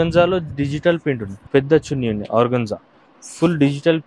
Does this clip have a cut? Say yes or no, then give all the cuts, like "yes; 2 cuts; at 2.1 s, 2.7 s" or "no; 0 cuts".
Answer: yes; 1 cut; at 1.3 s